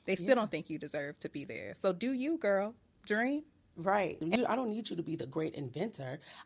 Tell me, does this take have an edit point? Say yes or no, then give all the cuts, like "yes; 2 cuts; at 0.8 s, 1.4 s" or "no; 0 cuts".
yes; 1 cut; at 4.2 s